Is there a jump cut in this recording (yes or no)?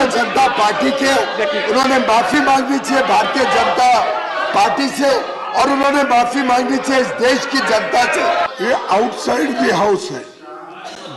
yes